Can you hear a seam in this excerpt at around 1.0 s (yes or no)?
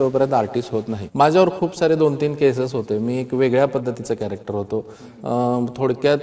yes